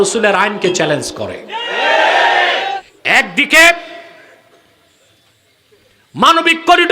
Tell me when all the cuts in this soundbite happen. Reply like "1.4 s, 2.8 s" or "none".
2.9 s